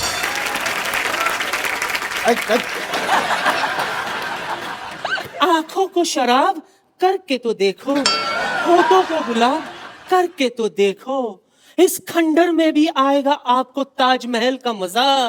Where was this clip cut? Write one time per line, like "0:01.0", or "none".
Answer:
none